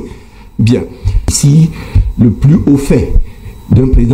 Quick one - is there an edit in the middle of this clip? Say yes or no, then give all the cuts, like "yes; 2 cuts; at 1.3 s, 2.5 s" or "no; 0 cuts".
yes; 1 cut; at 1.2 s